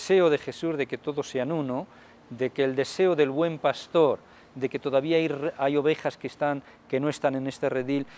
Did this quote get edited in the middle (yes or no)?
yes